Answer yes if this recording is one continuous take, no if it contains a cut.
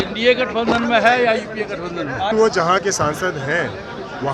no